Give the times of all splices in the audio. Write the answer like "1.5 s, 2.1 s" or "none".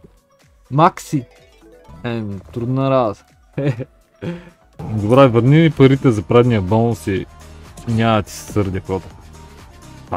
4.8 s